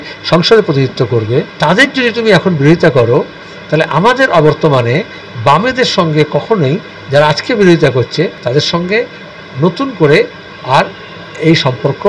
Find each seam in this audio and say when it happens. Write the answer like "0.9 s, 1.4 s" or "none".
1.5 s, 8.4 s